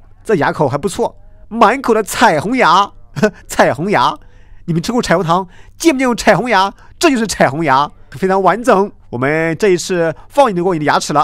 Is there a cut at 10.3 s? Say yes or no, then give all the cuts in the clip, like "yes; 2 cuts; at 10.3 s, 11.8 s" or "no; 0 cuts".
no; 2 cuts; at 8.0 s, 9.0 s